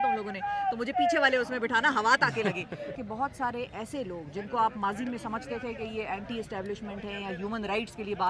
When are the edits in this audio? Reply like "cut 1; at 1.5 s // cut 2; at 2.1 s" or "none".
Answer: cut 1; at 3.0 s